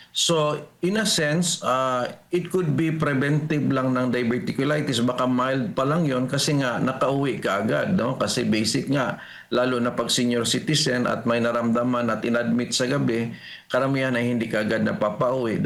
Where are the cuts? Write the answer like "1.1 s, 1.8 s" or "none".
none

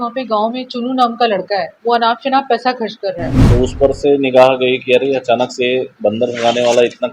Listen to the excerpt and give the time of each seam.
1.7 s, 3.3 s

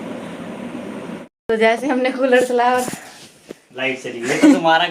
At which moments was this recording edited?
1.3 s

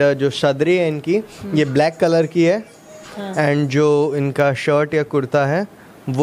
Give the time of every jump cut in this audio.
none

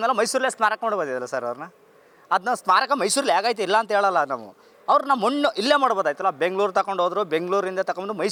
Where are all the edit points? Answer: none

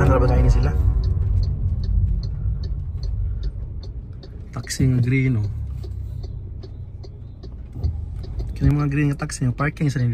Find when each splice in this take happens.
8.4 s

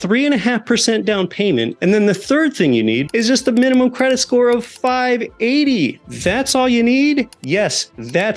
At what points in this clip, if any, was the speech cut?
1.7 s, 3.0 s, 6.1 s, 7.4 s

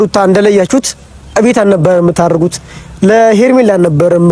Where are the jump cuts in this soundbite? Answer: none

